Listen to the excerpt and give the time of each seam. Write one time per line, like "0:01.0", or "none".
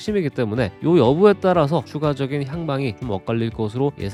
none